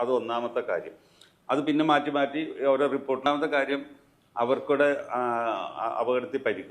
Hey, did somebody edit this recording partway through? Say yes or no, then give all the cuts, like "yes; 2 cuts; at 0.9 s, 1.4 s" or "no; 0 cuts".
yes; 1 cut; at 3.3 s